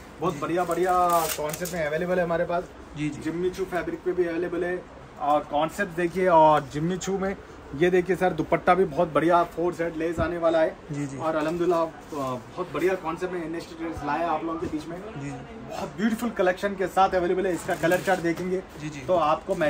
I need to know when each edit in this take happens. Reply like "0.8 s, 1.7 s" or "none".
none